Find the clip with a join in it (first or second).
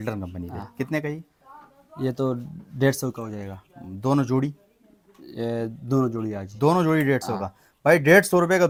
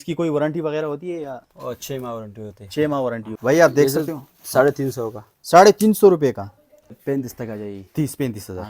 second